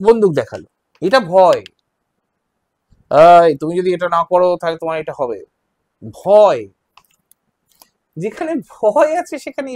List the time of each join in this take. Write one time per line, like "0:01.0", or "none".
none